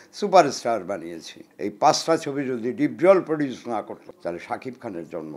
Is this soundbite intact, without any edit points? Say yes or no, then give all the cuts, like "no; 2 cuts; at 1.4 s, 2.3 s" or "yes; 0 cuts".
no; 2 cuts; at 1.4 s, 4.0 s